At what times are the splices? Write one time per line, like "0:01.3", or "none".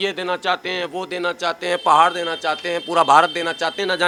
none